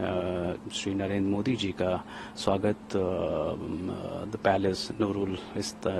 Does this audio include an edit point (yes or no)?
no